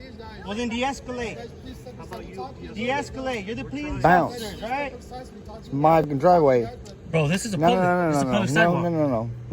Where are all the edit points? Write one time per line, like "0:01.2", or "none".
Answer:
0:06.1